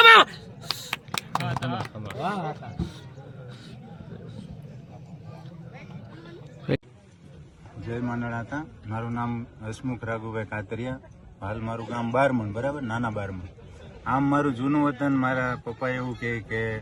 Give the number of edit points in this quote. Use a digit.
0